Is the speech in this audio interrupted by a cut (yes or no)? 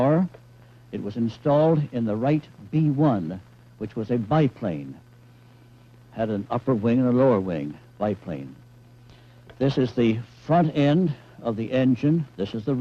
yes